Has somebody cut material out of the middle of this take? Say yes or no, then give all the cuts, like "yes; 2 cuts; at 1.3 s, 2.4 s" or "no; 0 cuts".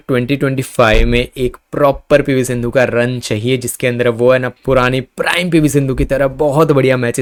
no; 0 cuts